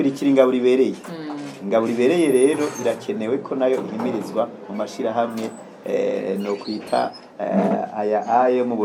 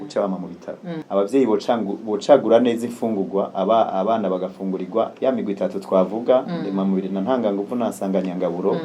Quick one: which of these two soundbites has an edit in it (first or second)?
second